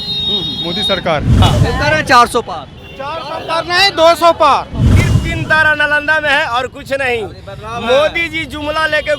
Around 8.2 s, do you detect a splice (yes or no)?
no